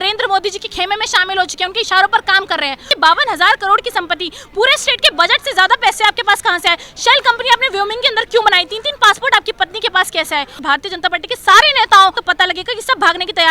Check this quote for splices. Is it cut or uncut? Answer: cut